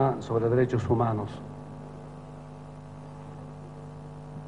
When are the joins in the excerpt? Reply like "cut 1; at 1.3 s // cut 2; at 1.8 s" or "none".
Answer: cut 1; at 1.9 s